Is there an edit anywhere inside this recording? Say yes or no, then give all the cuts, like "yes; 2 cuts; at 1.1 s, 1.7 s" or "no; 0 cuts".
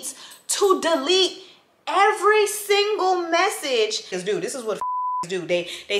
yes; 1 cut; at 4.1 s